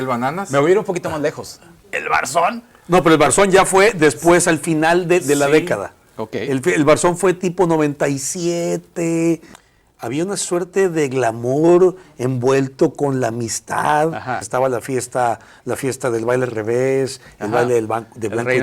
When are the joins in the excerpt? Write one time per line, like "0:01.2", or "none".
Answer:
0:09.5
0:14.4